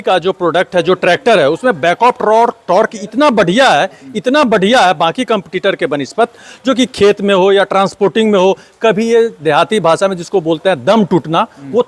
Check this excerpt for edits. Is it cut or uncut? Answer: uncut